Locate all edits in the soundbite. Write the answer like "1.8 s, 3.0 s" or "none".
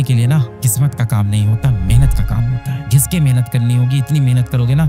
2.8 s